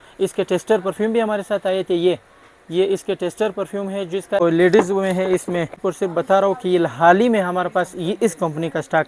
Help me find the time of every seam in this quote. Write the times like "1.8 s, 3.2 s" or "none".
4.4 s, 5.8 s